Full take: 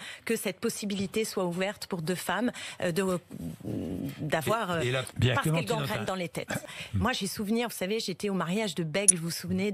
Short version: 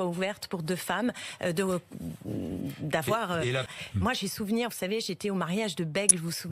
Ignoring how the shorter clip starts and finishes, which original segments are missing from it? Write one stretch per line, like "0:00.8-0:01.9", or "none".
0:05.1-0:06.7